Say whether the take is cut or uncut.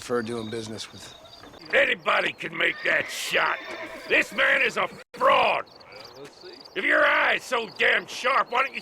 cut